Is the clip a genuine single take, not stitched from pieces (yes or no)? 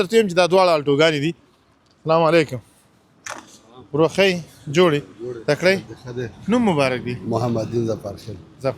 yes